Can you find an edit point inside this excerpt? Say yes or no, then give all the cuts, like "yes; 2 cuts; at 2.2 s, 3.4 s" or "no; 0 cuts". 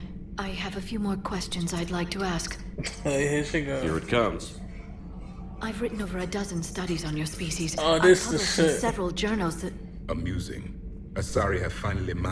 no; 0 cuts